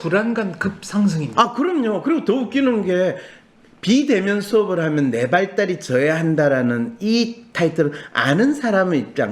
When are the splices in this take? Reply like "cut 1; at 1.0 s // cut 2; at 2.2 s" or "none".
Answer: none